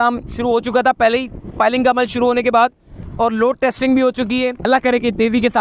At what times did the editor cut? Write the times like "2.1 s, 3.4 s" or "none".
2.9 s, 4.7 s